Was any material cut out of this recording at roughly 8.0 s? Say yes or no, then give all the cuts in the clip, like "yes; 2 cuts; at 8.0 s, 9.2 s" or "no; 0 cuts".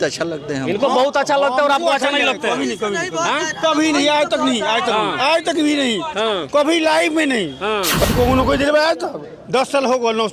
yes; 1 cut; at 8.0 s